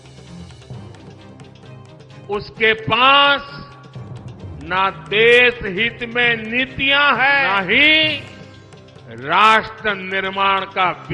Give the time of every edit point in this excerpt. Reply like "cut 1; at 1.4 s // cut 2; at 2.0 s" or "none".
cut 1; at 2.3 s